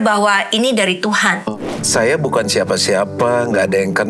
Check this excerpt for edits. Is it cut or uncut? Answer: cut